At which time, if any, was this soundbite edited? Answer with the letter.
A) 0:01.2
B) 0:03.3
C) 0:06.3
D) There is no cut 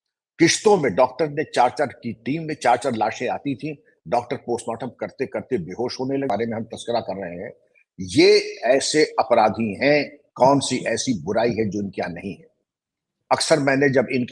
C